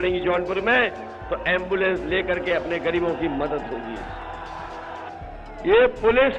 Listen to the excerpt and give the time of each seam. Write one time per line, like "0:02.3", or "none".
0:05.1